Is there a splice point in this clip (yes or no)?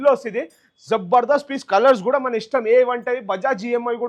no